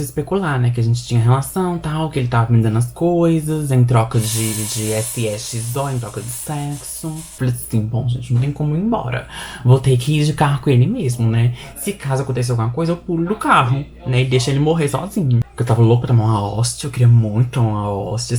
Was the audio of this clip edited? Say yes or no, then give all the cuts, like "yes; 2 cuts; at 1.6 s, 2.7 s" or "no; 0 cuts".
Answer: yes; 2 cuts; at 7.3 s, 15.5 s